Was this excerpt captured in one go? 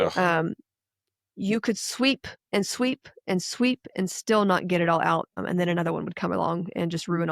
no; 2 cuts; at 2.3 s, 5.4 s

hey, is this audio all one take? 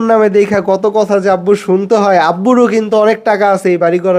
yes; 0 cuts

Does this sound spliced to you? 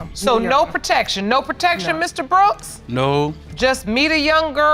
no; 0 cuts

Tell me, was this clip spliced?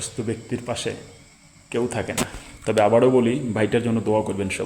yes; 1 cut; at 2.2 s

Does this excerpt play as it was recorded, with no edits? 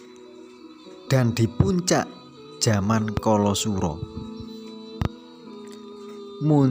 yes; 0 cuts

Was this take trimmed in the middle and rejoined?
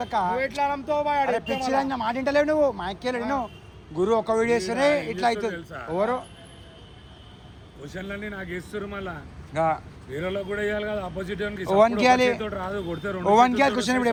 no; 0 cuts

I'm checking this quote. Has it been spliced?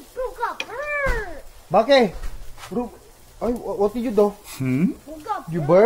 no; 0 cuts

